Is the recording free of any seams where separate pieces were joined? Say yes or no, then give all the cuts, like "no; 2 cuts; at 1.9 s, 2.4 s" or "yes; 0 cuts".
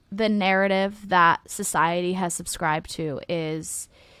yes; 0 cuts